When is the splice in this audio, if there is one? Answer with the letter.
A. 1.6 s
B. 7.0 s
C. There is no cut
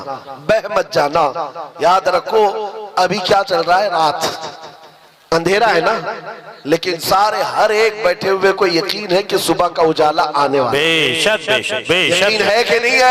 C